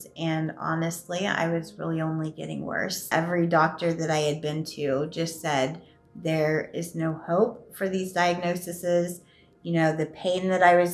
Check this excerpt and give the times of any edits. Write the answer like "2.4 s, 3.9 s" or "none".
3.1 s